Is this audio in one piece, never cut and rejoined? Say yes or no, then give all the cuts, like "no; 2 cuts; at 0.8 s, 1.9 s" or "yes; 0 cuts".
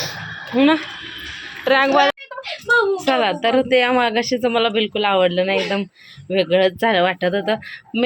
no; 1 cut; at 2.1 s